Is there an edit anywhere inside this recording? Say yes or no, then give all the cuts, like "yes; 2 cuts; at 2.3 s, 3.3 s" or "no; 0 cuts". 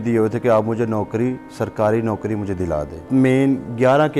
yes; 1 cut; at 3.1 s